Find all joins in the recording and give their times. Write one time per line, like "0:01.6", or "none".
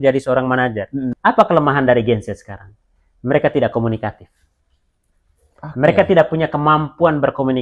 0:01.1